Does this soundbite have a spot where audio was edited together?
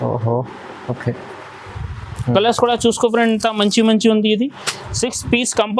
no; 0 cuts

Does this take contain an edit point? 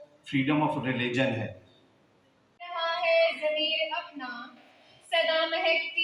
yes; 1 cut; at 2.6 s

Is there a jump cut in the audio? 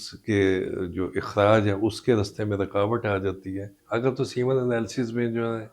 yes; 1 cut; at 3.7 s

